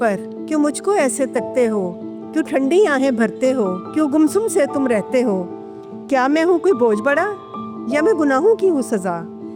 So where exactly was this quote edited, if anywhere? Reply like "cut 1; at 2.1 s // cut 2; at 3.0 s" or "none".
none